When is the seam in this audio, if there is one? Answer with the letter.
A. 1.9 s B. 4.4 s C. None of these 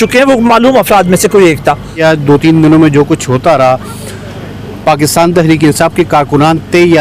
A